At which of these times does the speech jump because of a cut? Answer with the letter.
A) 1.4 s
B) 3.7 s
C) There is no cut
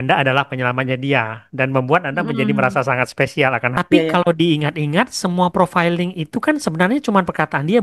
B